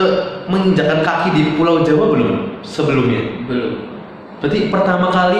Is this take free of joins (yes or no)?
yes